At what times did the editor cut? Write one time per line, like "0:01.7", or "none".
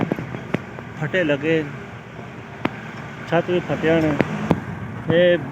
0:04.4

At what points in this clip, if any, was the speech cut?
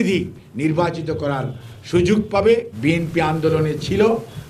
0:02.7

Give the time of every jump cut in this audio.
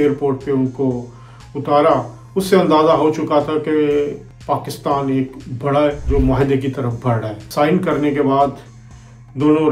0:04.3
0:06.0
0:07.4

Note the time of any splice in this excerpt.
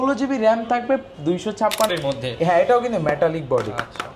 0:01.9

